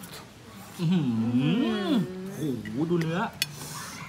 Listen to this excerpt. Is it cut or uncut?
cut